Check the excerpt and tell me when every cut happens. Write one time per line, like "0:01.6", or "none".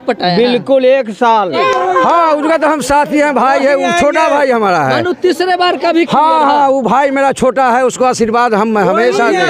0:01.5